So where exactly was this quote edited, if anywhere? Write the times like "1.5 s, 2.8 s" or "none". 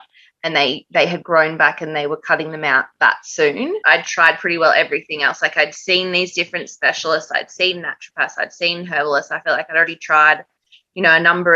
3.8 s